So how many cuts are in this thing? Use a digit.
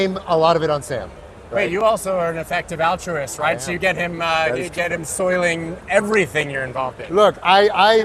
0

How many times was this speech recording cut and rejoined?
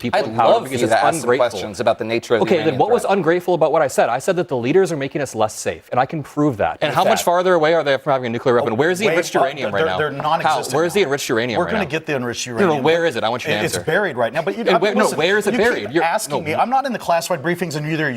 1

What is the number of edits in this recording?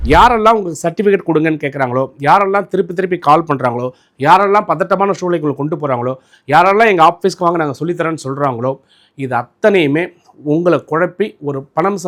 0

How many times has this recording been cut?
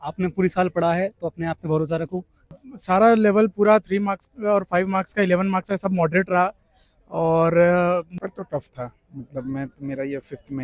2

